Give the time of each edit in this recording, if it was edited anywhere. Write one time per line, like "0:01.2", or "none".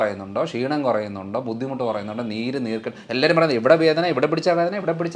none